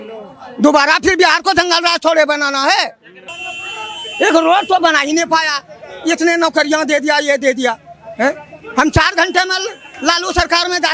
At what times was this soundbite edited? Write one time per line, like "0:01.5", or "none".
none